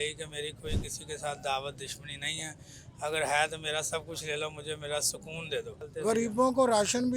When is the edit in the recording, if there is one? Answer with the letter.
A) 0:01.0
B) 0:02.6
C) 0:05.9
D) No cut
C